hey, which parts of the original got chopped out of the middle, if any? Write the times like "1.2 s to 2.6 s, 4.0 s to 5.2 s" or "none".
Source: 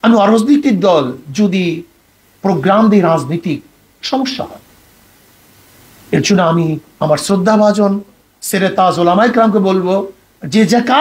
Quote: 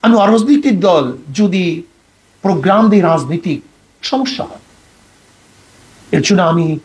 none